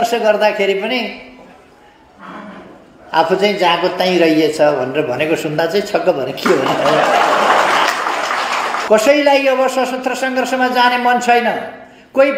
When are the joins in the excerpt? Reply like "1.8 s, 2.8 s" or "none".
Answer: 8.8 s

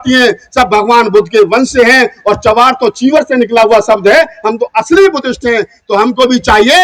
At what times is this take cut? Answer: none

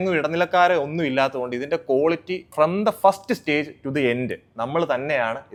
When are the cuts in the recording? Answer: none

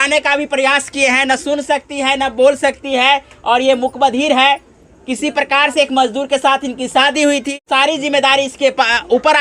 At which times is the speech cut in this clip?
7.5 s

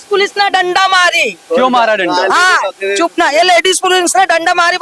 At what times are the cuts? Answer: none

